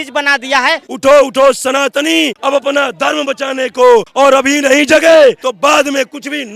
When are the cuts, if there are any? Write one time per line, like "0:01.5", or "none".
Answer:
0:00.9
0:02.4
0:04.1
0:05.5